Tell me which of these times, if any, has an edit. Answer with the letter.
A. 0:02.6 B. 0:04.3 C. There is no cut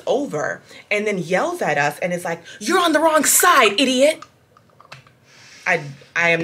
C